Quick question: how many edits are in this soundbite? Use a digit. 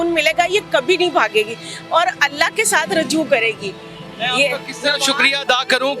0